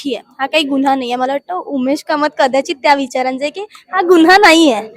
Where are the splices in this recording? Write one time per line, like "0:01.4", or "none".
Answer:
none